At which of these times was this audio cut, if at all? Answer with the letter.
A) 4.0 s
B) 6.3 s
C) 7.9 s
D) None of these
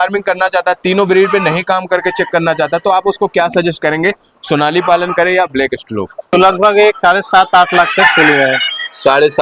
B